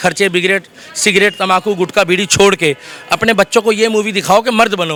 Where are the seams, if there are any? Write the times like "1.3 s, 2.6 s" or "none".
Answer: none